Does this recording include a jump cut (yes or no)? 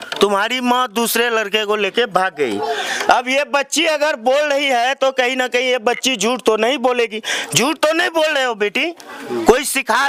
no